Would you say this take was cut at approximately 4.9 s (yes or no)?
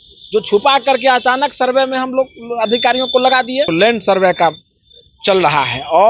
no